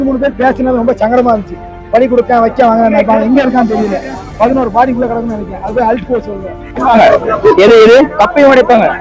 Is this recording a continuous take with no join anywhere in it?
no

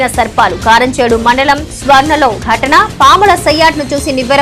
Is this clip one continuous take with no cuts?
yes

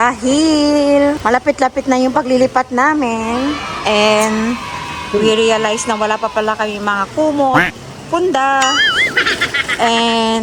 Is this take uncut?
yes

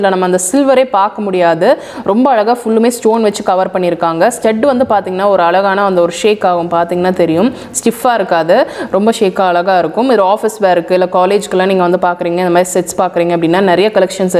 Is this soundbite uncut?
yes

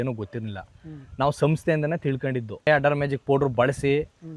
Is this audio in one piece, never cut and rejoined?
no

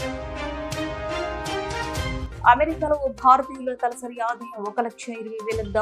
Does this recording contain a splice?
yes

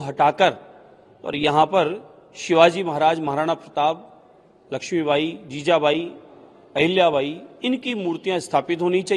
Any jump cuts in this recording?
no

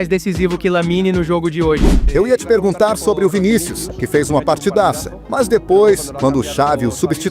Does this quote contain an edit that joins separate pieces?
yes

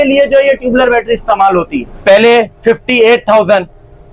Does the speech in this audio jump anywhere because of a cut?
yes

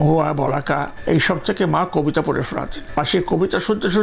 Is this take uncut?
no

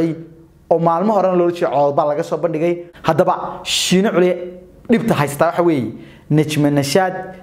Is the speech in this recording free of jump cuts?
no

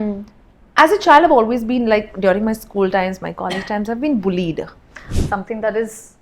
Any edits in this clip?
yes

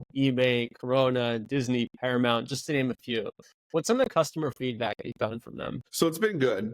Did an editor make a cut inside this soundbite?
yes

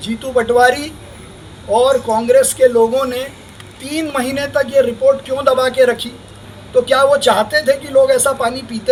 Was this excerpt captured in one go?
yes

